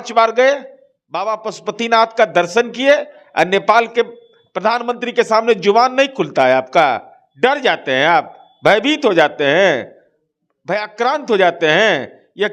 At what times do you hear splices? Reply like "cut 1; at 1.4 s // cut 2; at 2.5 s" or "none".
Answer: none